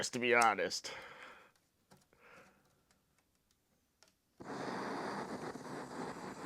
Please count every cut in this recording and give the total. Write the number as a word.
zero